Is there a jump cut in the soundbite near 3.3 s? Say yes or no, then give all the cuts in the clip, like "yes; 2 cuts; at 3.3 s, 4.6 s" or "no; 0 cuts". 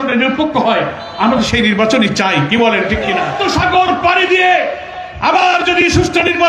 yes; 1 cut; at 3.3 s